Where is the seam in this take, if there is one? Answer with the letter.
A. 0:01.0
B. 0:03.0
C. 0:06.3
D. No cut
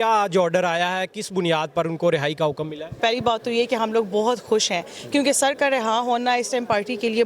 B